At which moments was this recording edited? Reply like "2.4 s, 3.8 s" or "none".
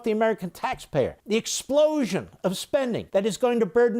1.2 s, 3.0 s